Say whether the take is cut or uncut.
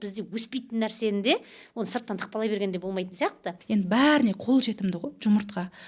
cut